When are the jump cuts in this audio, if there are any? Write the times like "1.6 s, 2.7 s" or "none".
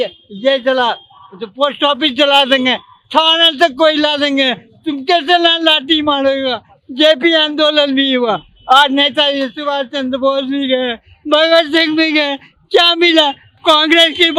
none